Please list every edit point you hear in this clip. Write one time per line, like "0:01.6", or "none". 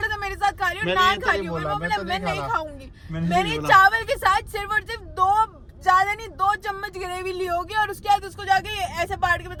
none